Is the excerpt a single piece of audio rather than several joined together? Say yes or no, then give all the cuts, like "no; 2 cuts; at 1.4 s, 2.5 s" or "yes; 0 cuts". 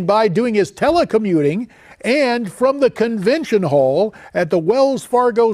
no; 1 cut; at 3.2 s